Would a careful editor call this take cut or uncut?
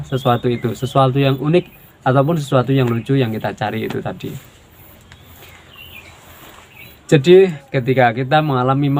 uncut